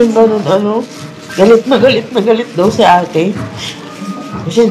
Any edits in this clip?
no; 0 cuts

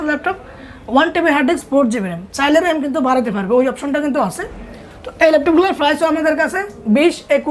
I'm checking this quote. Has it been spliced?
no; 0 cuts

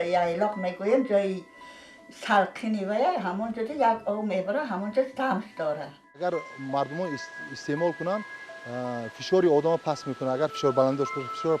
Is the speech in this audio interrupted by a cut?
yes; 1 cut; at 5.9 s

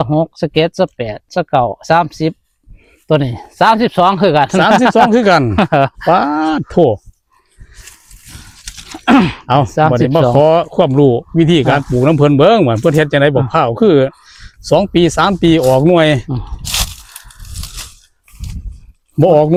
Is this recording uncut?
yes; 0 cuts

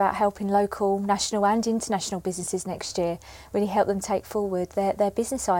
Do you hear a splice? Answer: no; 0 cuts

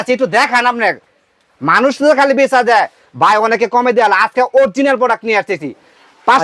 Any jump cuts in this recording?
no; 0 cuts

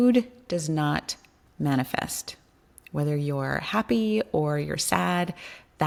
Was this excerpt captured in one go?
yes; 0 cuts

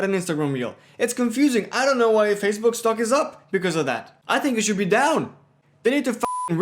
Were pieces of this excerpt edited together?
yes; 1 cut; at 4.1 s

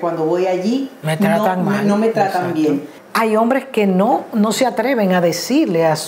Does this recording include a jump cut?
yes; 1 cut; at 2.9 s

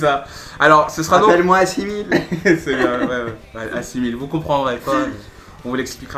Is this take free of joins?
yes; 0 cuts

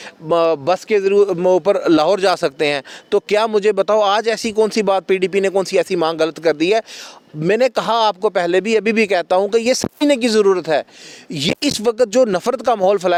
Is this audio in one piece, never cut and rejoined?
yes; 0 cuts

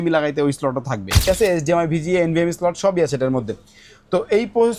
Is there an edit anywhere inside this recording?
yes; 1 cut; at 1.2 s

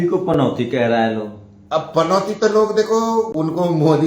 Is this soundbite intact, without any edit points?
yes; 0 cuts

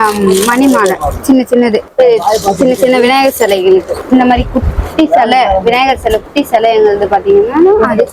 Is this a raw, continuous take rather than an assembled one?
yes; 0 cuts

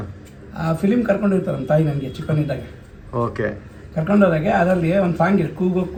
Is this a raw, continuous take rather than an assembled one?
yes; 0 cuts

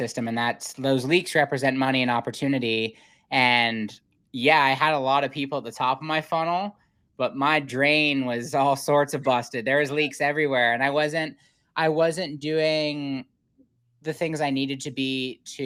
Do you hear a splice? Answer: no; 0 cuts

